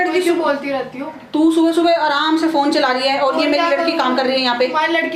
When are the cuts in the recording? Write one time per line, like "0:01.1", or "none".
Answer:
none

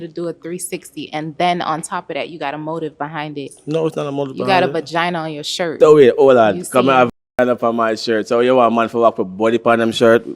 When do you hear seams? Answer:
0:05.7

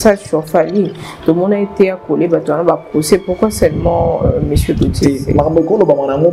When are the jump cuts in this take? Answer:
none

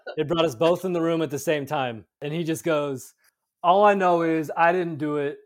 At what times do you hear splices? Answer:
0:02.2

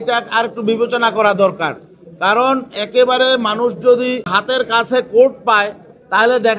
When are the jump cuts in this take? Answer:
0:04.3

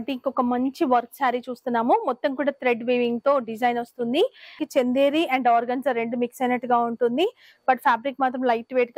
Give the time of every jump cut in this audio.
0:04.6

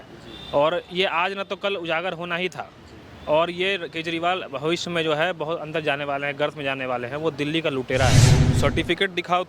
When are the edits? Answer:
0:08.4

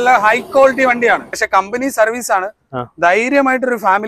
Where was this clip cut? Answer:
0:01.4

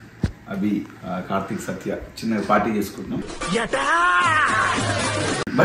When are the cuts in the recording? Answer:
0:01.0
0:03.3

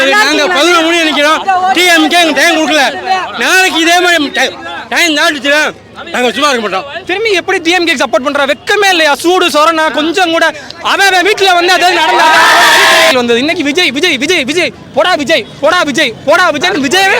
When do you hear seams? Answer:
0:07.0
0:13.1

